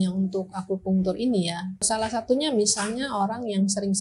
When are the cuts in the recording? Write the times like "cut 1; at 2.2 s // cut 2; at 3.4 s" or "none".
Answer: cut 1; at 1.8 s